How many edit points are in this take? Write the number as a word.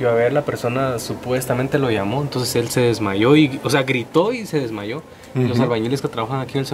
zero